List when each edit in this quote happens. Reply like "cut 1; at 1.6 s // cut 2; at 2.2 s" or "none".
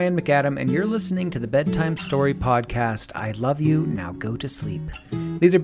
none